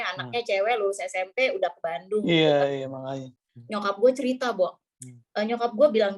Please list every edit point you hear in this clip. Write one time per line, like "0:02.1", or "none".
0:03.4